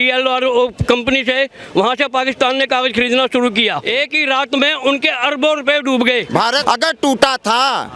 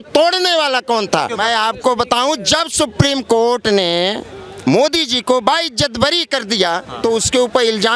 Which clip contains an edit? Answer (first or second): first